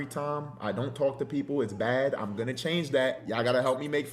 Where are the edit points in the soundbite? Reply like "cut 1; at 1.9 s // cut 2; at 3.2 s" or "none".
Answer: cut 1; at 3.2 s